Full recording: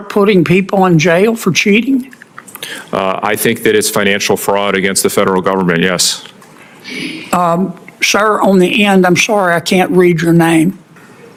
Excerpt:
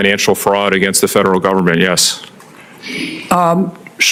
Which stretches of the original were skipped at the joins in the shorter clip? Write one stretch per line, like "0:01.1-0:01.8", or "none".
none